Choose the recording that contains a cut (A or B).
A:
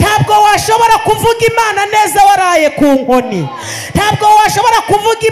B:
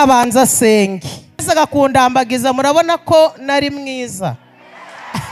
B